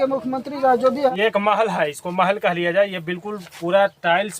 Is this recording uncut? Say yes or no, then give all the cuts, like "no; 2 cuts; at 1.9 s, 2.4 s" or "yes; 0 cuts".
no; 1 cut; at 1.1 s